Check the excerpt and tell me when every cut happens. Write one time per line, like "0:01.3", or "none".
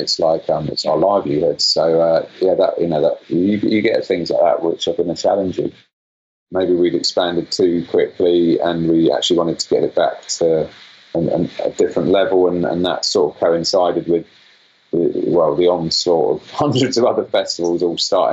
0:06.2